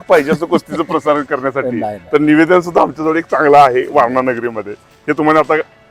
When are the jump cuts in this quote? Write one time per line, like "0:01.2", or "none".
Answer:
none